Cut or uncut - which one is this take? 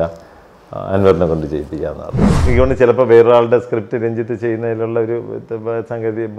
cut